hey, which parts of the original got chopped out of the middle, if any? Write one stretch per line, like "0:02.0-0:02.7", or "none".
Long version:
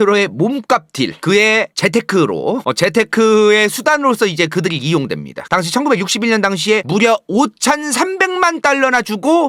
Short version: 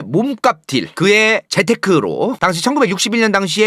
0:02.6-0:05.4